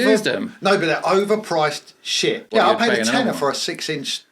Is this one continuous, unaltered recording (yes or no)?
no